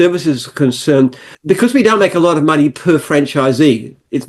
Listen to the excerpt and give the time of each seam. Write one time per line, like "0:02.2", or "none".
0:01.3